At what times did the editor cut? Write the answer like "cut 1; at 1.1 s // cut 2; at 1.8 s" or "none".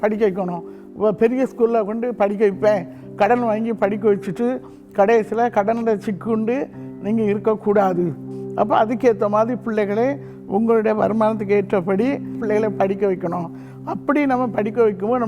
cut 1; at 12.4 s